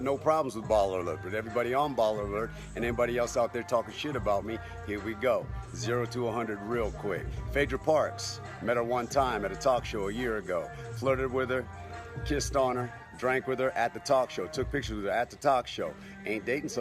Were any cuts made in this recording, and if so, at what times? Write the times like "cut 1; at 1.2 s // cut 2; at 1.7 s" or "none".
cut 1; at 3.1 s